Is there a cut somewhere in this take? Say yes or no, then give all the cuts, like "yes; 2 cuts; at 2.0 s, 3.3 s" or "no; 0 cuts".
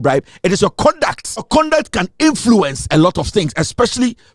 yes; 1 cut; at 1.4 s